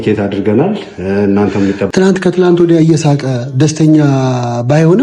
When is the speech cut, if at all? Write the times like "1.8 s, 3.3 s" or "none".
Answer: 1.8 s